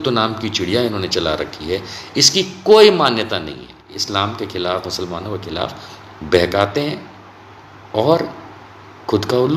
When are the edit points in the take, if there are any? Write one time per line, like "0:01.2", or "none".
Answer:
0:04.0